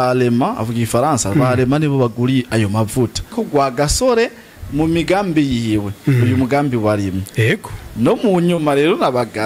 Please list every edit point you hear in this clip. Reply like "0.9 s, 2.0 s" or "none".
3.3 s